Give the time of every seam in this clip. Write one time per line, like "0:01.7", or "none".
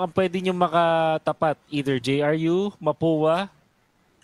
none